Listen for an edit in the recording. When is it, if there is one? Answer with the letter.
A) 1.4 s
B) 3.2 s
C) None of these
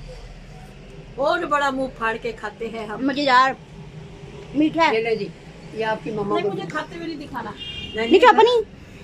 A